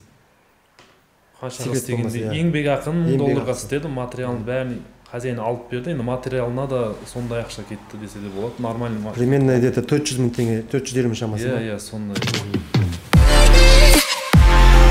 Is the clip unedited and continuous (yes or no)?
yes